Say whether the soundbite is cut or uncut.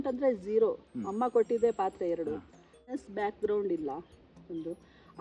cut